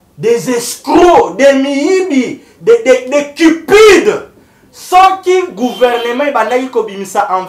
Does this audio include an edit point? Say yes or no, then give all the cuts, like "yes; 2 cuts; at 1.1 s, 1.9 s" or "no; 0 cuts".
no; 0 cuts